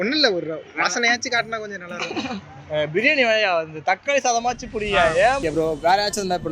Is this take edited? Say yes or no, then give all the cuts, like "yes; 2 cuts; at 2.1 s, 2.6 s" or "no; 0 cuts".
yes; 1 cut; at 5.4 s